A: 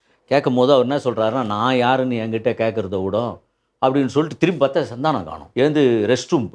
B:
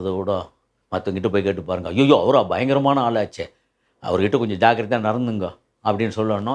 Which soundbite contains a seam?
A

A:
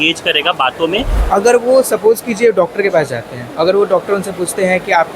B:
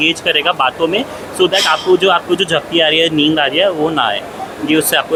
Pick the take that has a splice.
A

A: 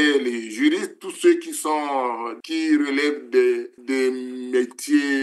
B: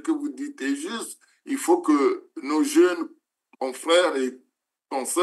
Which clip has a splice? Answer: A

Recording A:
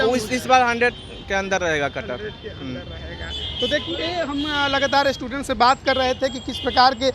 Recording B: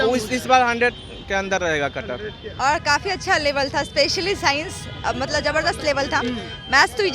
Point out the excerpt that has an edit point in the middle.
B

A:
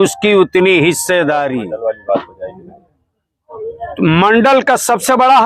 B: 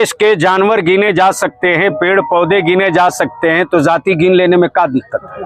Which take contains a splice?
A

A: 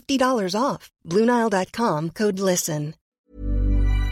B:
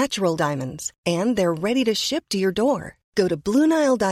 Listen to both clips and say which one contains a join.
A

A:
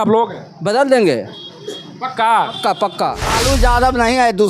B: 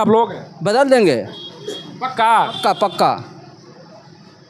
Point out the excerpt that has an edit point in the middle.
A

